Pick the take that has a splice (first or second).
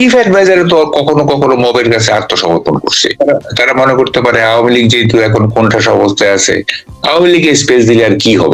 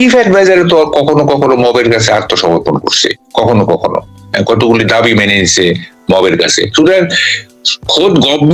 first